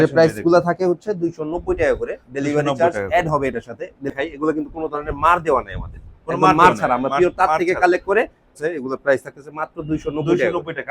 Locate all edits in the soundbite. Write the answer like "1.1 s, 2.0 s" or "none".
4.1 s, 8.5 s